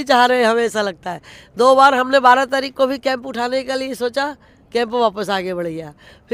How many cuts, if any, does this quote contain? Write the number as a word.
zero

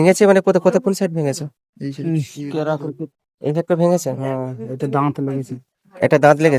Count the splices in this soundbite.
zero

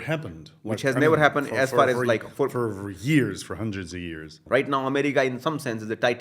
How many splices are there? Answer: one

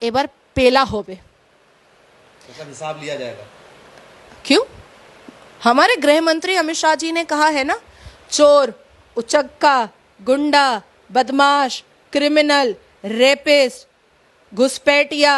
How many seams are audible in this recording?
zero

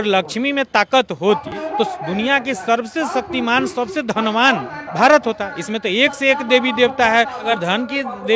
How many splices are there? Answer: three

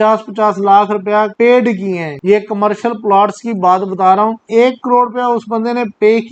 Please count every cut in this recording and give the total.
three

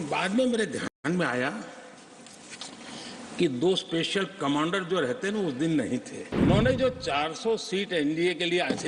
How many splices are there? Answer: one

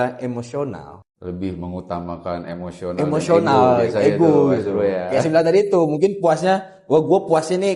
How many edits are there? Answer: one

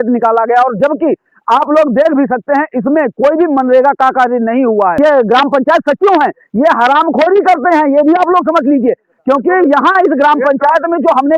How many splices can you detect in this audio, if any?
one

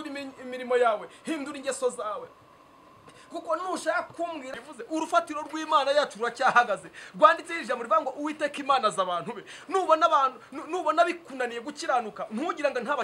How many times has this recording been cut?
one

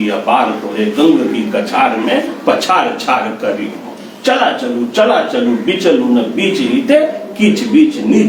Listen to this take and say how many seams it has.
zero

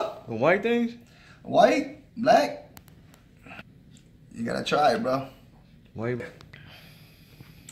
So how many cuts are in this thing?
two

